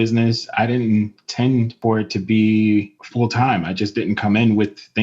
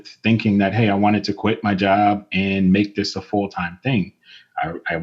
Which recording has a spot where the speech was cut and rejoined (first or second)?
first